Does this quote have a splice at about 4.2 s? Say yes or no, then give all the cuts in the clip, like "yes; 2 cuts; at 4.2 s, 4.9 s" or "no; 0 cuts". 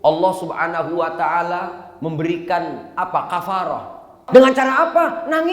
yes; 1 cut; at 4.2 s